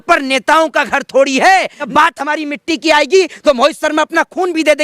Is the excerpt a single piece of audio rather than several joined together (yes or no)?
no